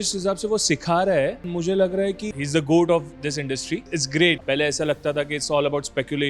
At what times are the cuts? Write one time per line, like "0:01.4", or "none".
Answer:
0:04.4